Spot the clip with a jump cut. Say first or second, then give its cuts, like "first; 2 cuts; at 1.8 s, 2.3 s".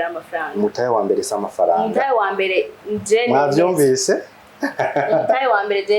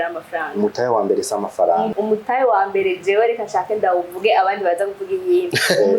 second; 1 cut; at 1.9 s